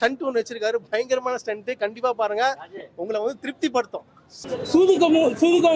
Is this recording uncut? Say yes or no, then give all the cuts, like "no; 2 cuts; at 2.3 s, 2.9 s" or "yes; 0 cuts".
no; 1 cut; at 4.4 s